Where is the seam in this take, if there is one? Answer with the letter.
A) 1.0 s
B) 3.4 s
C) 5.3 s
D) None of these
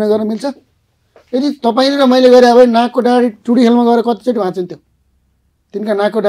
D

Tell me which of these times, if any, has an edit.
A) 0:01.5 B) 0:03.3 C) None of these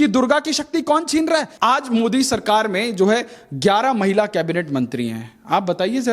A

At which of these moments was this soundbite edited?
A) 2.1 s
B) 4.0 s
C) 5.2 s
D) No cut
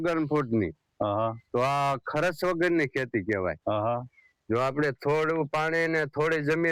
D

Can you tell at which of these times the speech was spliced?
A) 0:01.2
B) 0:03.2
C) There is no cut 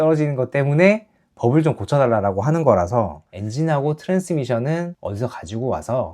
B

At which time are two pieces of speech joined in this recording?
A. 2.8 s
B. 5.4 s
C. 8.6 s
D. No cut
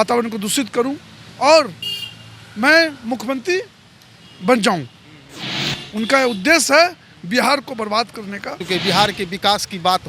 C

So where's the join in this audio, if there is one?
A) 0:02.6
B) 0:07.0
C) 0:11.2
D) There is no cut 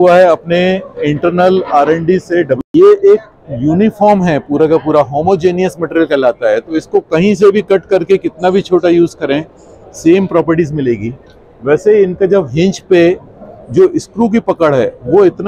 A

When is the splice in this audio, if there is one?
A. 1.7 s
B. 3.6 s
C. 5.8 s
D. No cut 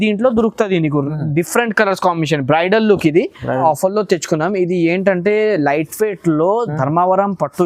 B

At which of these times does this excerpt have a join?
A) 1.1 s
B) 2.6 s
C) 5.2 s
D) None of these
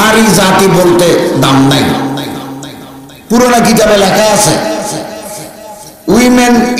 D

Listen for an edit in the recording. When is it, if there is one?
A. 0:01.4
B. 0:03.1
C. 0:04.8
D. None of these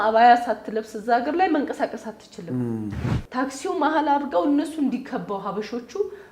B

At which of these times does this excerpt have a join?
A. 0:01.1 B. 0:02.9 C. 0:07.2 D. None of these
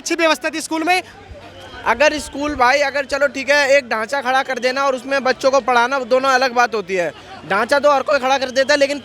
D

